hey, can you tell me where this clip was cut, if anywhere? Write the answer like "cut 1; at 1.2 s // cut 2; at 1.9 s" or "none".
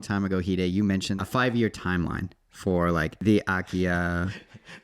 cut 1; at 1.1 s // cut 2; at 3.1 s